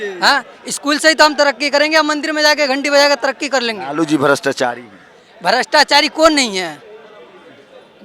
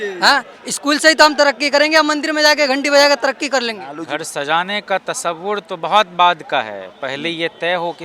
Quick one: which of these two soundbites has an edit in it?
second; 1 cut; at 3.8 s

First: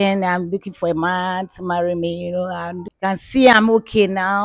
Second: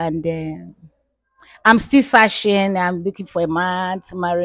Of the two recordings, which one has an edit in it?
first; 1 cut; at 2.9 s

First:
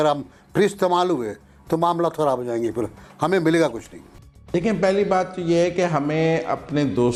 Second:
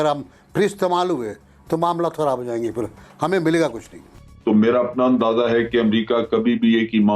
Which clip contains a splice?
second; 1 cut; at 4.2 s

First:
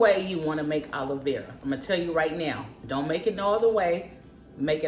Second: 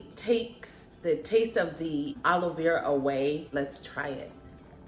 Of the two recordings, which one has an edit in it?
second; 2 cuts; at 2.1 s, 3.5 s

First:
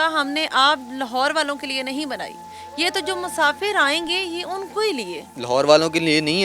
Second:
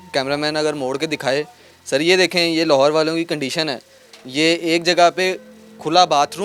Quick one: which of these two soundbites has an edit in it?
first; 1 cut; at 5.3 s

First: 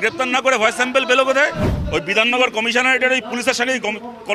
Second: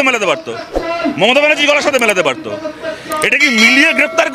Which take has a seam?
first; 1 cut; at 2.1 s

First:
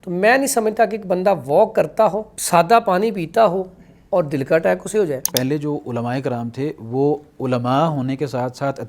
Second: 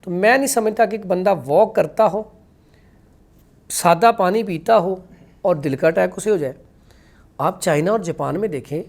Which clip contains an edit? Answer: first; 2 cuts; at 2.3 s, 5.3 s

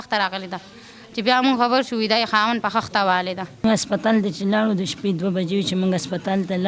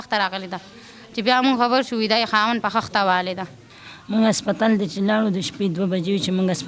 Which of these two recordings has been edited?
first; 1 cut; at 3.6 s

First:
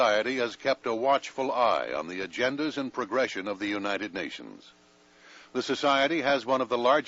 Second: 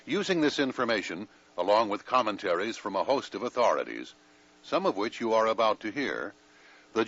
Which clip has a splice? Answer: first; 1 cut; at 0.9 s

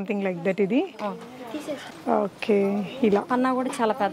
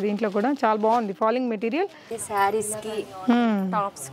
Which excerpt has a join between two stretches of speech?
second; 1 cut; at 2.2 s

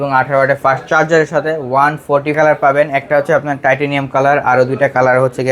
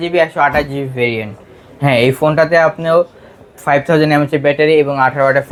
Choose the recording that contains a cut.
first; 1 cut; at 2.4 s

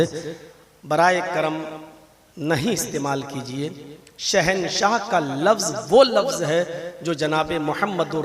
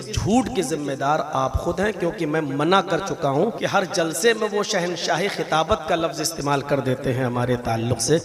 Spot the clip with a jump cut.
second; 1 cut; at 3.6 s

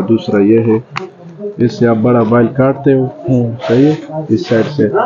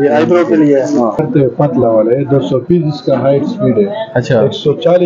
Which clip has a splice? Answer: second; 1 cut; at 1.2 s

